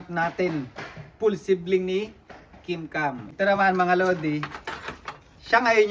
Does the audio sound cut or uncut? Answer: cut